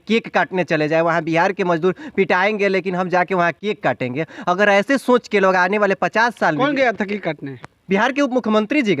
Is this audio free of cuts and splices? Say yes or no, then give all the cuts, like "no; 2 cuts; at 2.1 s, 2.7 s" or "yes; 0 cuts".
yes; 0 cuts